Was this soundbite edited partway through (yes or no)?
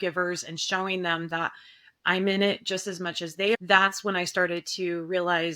yes